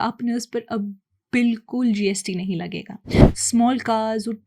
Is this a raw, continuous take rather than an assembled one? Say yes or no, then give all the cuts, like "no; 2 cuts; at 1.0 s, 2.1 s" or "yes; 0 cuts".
no; 1 cut; at 3.2 s